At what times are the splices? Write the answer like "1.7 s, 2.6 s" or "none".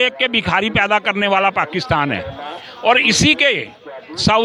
none